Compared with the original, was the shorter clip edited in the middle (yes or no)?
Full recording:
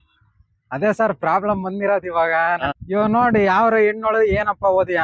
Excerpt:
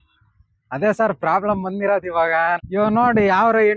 yes